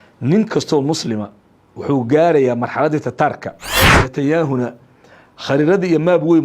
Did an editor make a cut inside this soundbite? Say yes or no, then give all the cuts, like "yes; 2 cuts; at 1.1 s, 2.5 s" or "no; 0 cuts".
yes; 1 cut; at 4.0 s